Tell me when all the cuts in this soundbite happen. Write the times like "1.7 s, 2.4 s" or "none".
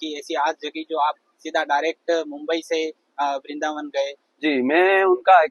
none